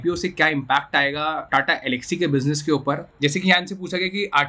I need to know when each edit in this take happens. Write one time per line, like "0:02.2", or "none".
0:01.4
0:03.1

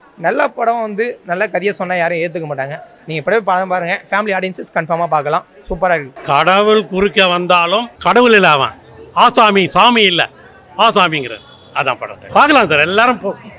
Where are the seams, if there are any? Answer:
0:06.1
0:07.9
0:12.1

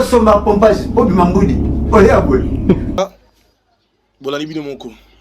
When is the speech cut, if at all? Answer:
0:03.0

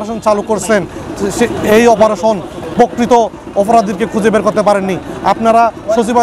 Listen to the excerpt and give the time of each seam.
0:02.9

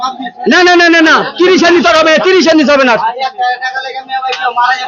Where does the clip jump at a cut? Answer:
none

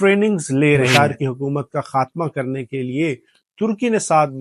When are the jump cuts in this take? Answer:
0:00.9

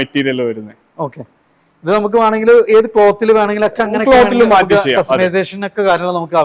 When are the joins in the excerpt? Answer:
none

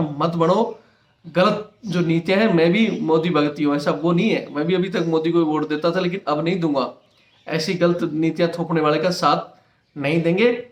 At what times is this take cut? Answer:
none

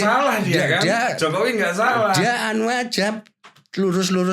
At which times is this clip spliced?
none

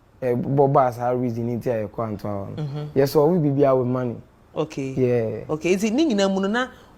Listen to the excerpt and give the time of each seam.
none

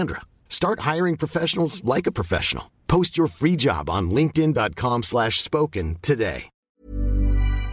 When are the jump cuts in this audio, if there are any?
0:06.7

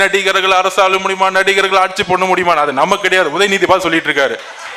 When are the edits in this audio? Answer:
none

